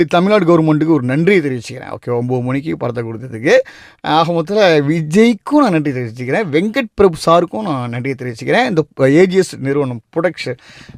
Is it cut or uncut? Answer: uncut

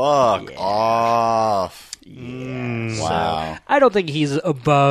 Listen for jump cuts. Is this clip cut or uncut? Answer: uncut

